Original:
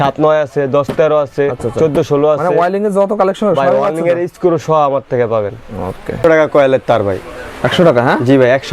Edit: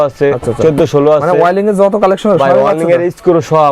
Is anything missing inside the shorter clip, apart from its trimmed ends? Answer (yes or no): no